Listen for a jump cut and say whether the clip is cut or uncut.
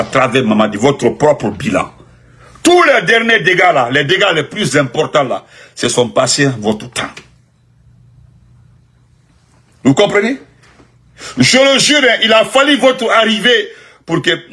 uncut